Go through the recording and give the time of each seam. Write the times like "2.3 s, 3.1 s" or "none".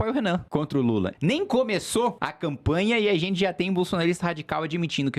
1.0 s, 2.3 s